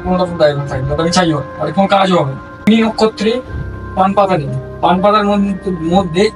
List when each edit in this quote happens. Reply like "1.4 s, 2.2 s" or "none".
2.7 s